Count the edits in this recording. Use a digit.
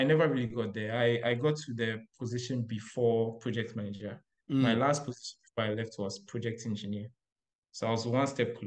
0